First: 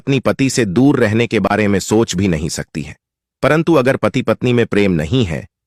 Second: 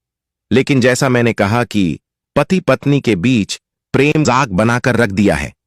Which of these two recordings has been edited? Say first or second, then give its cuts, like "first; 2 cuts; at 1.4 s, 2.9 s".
second; 1 cut; at 4.2 s